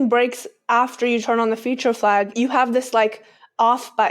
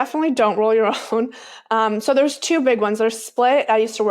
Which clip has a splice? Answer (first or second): first